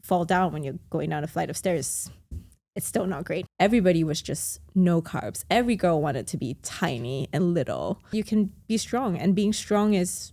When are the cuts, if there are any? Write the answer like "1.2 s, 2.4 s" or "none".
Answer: 3.4 s, 8.1 s